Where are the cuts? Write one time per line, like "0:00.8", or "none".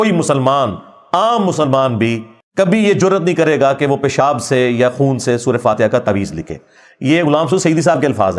none